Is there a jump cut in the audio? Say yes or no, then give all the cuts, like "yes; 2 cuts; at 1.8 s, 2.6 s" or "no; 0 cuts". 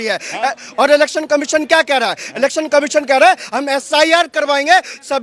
no; 0 cuts